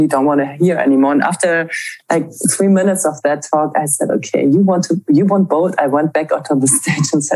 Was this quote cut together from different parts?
no; 0 cuts

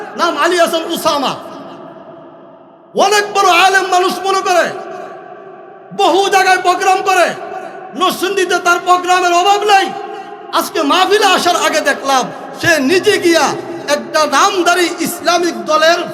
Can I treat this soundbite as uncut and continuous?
yes; 0 cuts

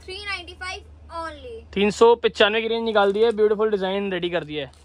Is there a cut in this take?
no; 0 cuts

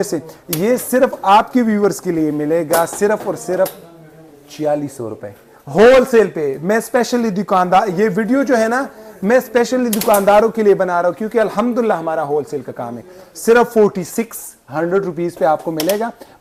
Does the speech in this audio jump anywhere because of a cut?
no; 0 cuts

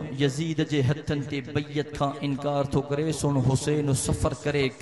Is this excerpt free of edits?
yes; 0 cuts

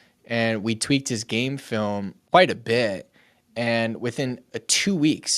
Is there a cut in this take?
yes; 1 cut; at 2.2 s

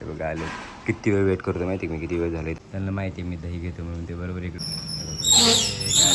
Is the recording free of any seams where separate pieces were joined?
no; 2 cuts; at 2.6 s, 4.6 s

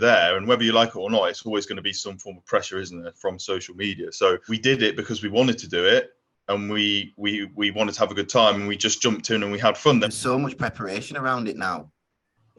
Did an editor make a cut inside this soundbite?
yes; 2 cuts; at 4.5 s, 10.1 s

